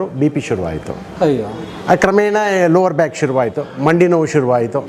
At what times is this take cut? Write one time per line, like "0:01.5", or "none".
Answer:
none